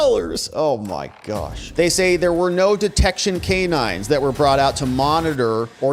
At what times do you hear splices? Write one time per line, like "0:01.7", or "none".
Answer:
0:01.6